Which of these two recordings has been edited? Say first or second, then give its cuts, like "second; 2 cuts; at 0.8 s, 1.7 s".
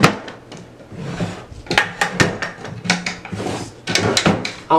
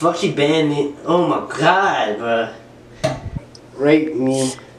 second; 1 cut; at 3.4 s